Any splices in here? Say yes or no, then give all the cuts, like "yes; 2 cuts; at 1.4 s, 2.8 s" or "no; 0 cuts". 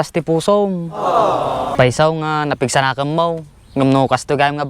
yes; 1 cut; at 1.7 s